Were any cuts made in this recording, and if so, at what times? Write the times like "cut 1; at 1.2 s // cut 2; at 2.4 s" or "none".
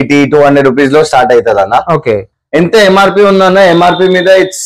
cut 1; at 2.3 s

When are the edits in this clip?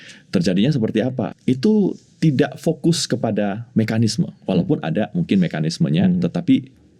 cut 1; at 1.3 s

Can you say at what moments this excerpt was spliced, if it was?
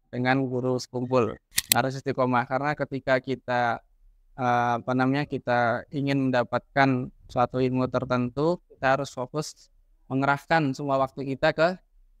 cut 1; at 1.5 s

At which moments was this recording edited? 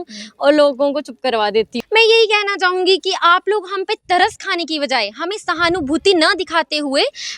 cut 1; at 1.7 s

